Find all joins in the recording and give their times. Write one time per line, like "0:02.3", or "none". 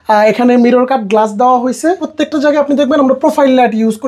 none

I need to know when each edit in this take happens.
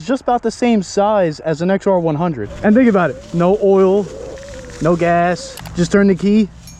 0:02.5
0:05.6

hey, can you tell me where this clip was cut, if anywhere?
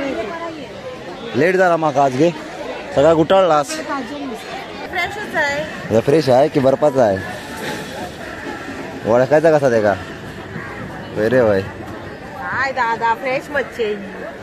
0:04.9

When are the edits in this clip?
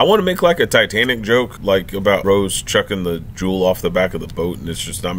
0:01.9

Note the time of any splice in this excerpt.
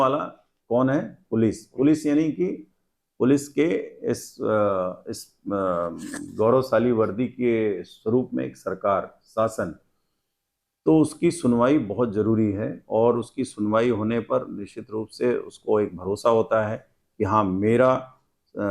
none

